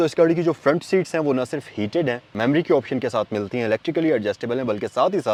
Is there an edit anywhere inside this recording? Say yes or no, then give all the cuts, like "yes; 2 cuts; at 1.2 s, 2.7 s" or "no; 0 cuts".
no; 0 cuts